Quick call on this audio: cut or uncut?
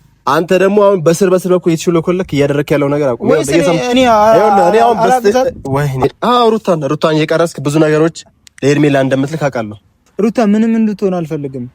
cut